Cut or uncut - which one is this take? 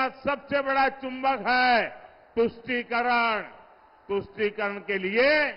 uncut